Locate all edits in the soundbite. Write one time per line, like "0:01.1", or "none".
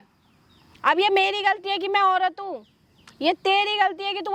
none

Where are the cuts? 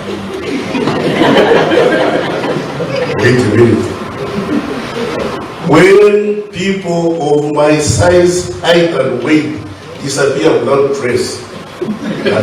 none

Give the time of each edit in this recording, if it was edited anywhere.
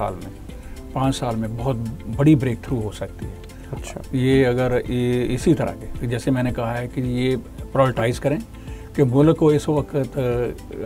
none

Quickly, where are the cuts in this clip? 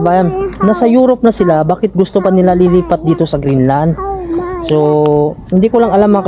none

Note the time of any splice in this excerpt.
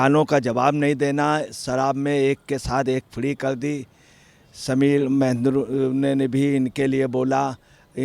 none

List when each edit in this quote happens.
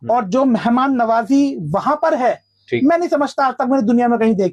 none

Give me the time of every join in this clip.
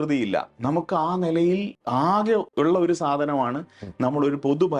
0:02.2

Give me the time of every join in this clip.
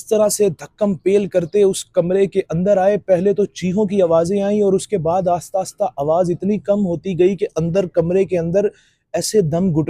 none

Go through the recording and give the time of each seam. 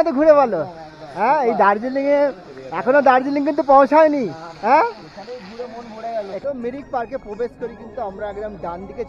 0:06.4

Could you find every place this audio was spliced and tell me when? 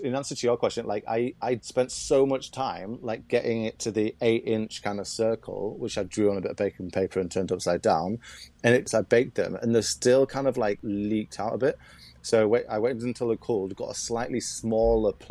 0:01.7
0:08.9
0:10.8

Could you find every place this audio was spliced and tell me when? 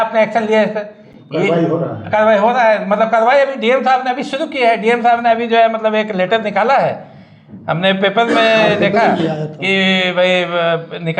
none

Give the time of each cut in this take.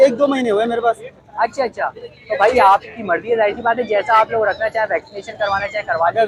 none

